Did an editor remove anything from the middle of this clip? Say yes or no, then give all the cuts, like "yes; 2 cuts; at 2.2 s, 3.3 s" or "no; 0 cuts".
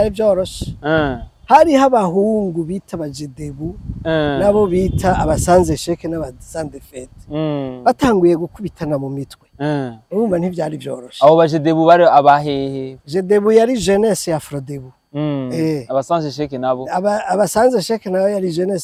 no; 0 cuts